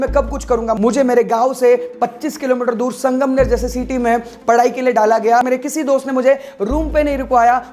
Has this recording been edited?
yes; 2 cuts; at 0.8 s, 5.4 s

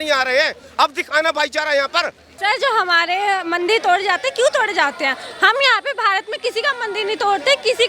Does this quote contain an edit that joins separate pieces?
yes; 1 cut; at 2.3 s

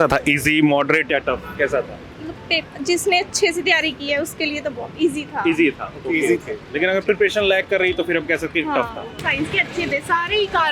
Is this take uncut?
no; 1 cut; at 9.2 s

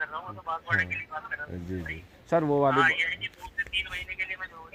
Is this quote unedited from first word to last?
yes; 0 cuts

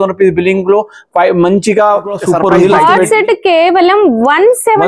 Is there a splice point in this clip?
yes; 1 cut; at 2.3 s

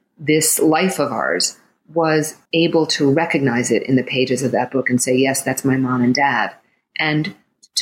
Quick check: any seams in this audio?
yes; 1 cut; at 2.4 s

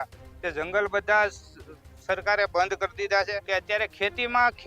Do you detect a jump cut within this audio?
yes; 1 cut; at 3.4 s

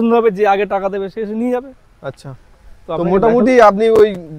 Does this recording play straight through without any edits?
yes; 0 cuts

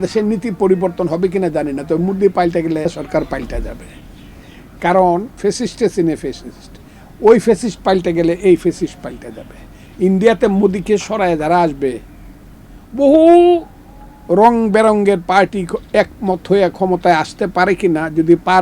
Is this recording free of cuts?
no; 2 cuts; at 2.9 s, 5.3 s

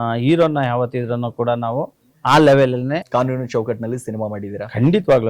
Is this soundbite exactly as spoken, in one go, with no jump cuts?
no; 1 cut; at 3.0 s

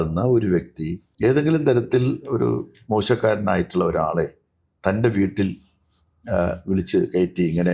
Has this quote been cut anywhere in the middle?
yes; 1 cut; at 1.0 s

